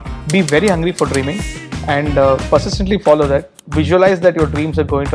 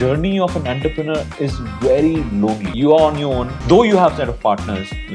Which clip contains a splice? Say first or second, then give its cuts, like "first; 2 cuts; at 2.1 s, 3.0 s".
second; 2 cuts; at 2.7 s, 3.5 s